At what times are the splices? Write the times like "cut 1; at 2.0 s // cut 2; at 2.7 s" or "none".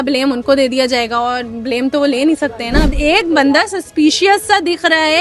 cut 1; at 2.9 s